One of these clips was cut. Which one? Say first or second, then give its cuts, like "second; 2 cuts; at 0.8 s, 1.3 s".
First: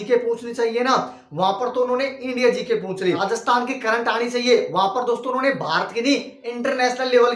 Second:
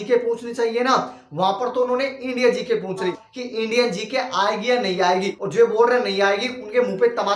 second; 2 cuts; at 3.1 s, 5.4 s